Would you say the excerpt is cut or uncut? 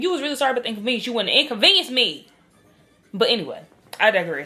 uncut